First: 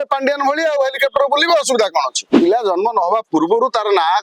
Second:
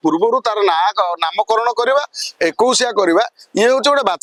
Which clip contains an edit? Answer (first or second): first